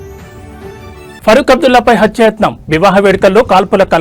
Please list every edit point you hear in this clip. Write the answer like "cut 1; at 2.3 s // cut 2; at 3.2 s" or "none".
cut 1; at 1.1 s